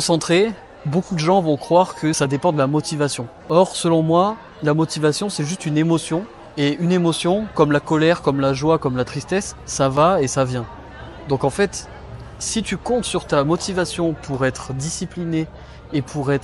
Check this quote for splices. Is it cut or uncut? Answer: cut